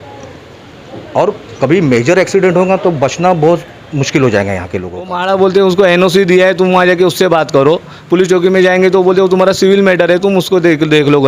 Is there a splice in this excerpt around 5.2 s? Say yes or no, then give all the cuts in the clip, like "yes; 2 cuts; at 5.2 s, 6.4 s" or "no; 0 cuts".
yes; 1 cut; at 5.2 s